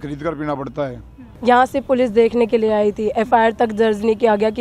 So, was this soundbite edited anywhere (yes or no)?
yes